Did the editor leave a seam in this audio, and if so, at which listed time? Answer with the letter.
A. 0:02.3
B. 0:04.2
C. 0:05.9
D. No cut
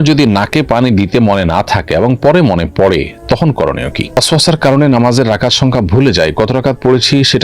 B